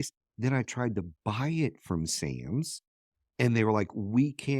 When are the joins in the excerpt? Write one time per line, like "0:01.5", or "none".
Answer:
none